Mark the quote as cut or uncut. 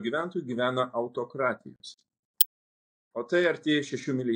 uncut